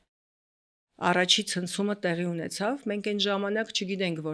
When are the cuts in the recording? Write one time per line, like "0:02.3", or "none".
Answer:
none